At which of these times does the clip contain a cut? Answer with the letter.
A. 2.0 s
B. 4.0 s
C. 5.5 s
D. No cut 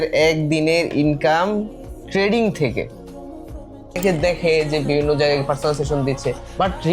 B